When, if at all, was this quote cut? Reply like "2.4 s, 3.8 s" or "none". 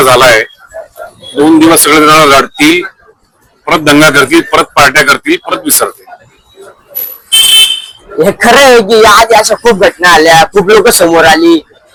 none